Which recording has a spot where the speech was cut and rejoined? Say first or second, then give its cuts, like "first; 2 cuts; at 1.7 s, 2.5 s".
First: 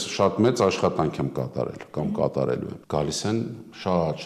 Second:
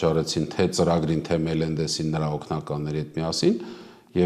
first; 1 cut; at 2.8 s